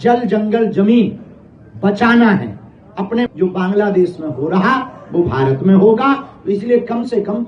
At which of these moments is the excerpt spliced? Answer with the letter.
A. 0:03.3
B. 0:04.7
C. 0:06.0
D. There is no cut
A